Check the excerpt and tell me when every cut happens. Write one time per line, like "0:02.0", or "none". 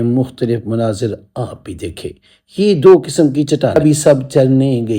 0:03.8